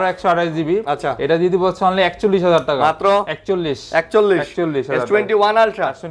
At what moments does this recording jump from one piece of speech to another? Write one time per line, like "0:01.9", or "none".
none